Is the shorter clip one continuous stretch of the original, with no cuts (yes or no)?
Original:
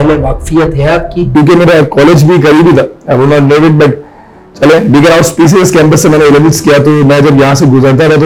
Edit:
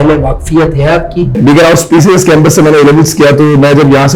no